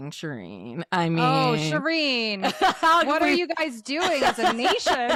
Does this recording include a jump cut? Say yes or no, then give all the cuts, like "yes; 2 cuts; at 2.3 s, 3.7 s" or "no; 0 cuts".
no; 0 cuts